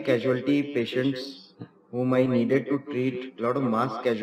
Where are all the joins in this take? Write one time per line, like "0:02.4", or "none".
none